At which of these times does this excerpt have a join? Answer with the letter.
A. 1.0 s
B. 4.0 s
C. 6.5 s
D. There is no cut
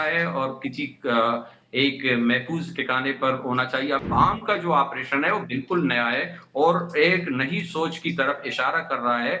B